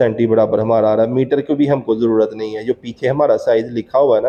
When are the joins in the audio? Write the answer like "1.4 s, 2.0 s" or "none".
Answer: none